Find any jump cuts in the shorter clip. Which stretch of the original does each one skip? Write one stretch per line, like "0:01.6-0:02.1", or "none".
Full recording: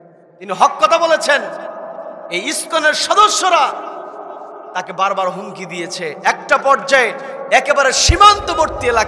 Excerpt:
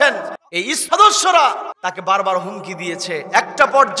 0:02.1-0:03.0
0:03.9-0:04.6